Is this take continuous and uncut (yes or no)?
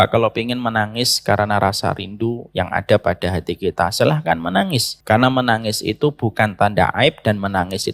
no